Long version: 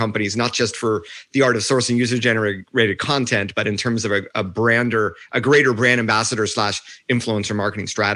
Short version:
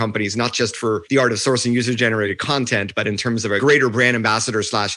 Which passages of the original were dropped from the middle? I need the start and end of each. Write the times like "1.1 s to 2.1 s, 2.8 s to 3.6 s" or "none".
1.0 s to 1.3 s, 2.6 s to 3.0 s, 4.2 s to 5.4 s